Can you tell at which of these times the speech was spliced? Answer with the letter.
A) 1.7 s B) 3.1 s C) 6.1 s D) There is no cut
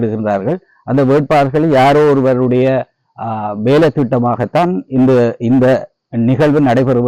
D